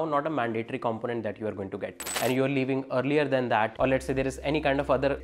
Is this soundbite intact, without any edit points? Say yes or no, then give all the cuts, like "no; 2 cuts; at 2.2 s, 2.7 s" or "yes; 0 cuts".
no; 1 cut; at 2.1 s